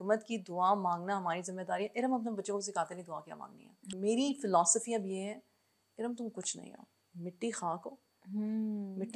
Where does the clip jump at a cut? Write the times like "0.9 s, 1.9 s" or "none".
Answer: 3.9 s